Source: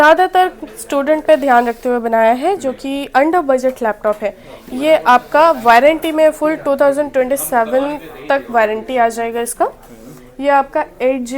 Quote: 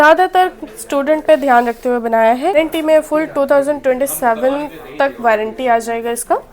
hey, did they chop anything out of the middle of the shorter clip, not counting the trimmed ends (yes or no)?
yes